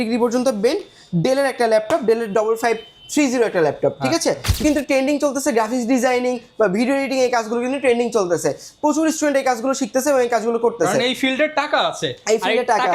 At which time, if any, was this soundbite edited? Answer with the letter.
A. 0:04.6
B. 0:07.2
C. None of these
A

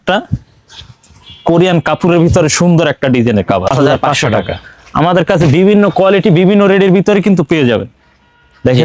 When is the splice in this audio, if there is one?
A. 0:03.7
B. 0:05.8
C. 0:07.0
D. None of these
A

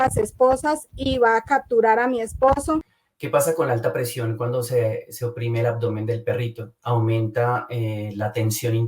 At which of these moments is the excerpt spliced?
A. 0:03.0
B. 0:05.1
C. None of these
A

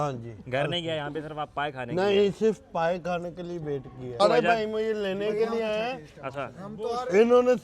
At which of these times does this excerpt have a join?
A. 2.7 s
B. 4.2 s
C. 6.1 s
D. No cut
B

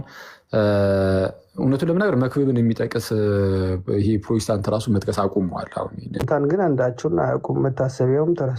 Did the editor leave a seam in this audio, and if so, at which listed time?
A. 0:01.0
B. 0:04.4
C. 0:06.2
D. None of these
C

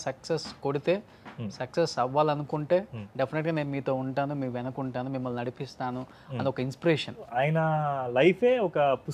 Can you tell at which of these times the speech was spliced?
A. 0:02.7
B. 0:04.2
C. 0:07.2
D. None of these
C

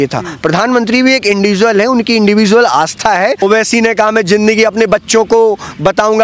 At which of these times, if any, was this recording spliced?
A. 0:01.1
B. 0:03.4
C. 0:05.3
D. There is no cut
B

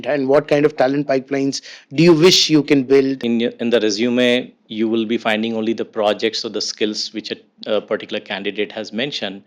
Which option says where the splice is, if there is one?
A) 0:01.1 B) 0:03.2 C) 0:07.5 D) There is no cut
B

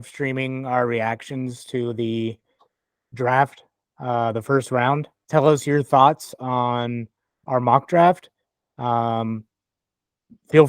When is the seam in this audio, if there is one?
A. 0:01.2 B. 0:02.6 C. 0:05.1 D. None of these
C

